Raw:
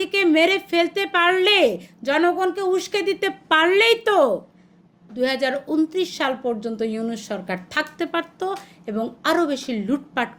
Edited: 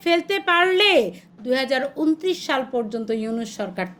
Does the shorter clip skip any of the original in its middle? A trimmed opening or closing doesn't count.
yes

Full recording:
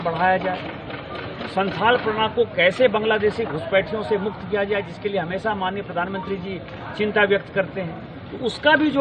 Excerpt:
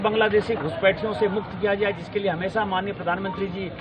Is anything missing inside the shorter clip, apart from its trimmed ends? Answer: no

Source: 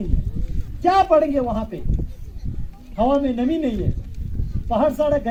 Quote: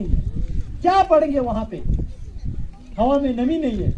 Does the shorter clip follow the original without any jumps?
yes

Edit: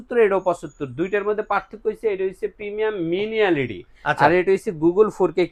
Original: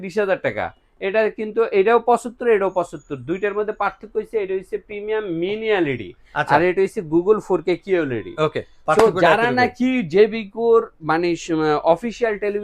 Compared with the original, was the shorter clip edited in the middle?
no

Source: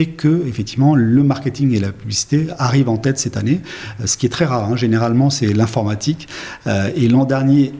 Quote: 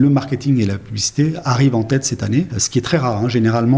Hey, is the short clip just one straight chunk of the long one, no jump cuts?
no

